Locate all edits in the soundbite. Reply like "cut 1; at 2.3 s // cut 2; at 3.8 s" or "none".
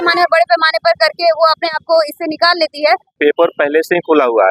cut 1; at 3.1 s